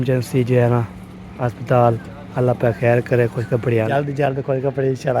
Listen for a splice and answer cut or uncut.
cut